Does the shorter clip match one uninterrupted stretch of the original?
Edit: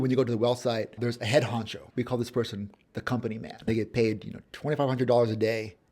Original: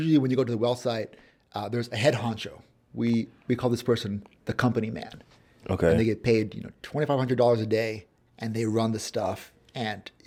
no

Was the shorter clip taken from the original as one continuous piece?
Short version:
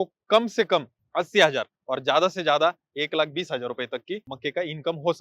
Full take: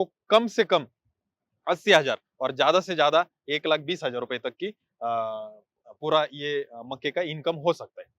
no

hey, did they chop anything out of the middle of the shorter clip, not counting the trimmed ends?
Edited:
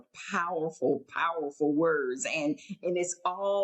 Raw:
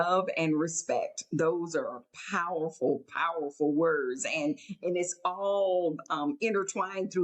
no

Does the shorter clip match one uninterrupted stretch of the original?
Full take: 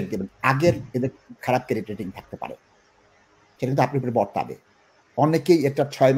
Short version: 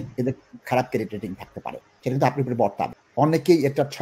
no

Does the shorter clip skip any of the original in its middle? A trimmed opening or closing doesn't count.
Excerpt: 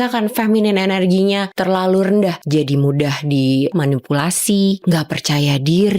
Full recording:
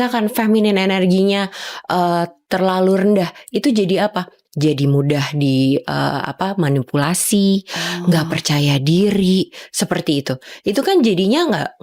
yes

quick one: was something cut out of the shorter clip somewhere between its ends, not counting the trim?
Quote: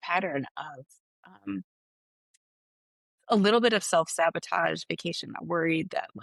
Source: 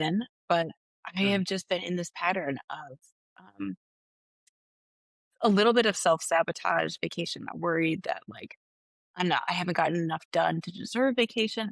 no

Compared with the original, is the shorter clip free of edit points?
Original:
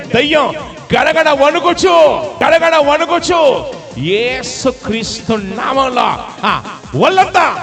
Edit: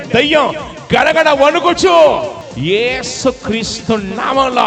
no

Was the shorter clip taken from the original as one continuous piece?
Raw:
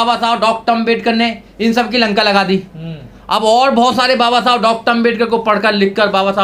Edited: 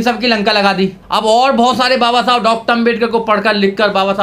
no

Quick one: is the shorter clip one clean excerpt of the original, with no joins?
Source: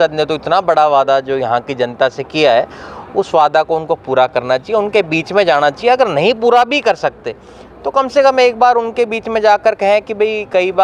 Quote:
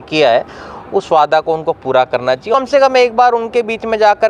no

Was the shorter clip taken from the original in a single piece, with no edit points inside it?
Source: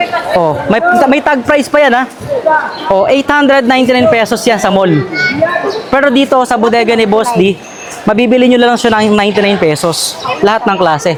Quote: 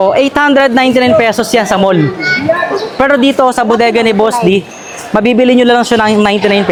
yes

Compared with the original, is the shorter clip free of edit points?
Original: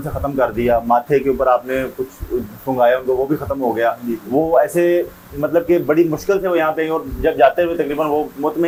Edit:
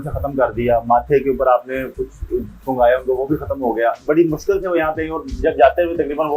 no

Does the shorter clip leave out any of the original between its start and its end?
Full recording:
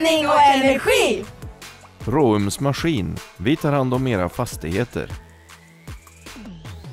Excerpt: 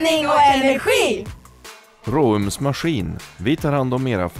no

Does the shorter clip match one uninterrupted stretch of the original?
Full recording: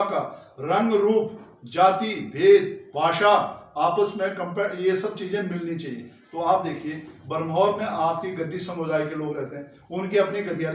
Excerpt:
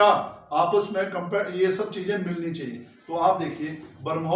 yes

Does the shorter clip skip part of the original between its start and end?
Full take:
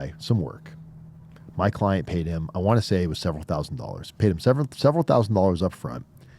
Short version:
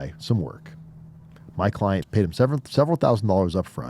yes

